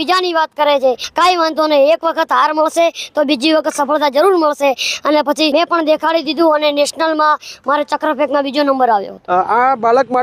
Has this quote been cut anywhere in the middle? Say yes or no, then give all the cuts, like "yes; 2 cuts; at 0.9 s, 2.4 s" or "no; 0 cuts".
yes; 3 cuts; at 1.1 s, 5.5 s, 9.1 s